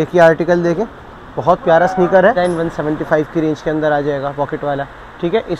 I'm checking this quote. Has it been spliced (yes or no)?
yes